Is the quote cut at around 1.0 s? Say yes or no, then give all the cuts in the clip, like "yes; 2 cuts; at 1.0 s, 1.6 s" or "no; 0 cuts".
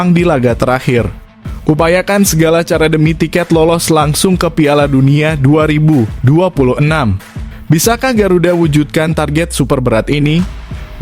no; 0 cuts